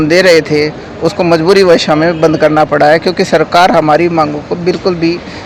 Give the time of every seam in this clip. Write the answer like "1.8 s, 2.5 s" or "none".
none